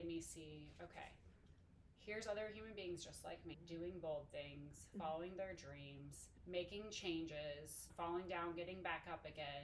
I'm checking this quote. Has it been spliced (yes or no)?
yes